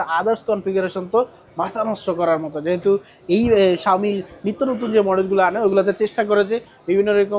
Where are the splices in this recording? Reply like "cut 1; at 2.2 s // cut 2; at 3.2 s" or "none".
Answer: none